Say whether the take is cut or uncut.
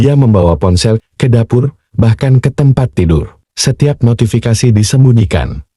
cut